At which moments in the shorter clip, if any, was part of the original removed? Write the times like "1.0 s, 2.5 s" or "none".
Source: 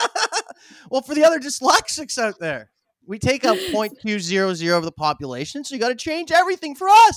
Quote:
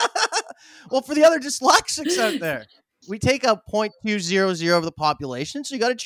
none